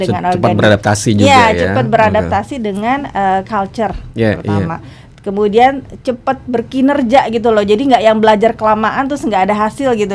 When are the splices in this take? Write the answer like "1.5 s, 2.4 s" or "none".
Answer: none